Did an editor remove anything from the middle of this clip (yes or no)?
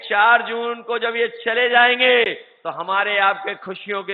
no